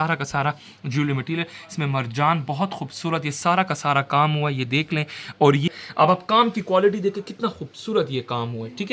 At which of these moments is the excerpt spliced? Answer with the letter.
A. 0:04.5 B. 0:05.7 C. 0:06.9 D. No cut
B